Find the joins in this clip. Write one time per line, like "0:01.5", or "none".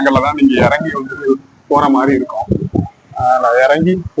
none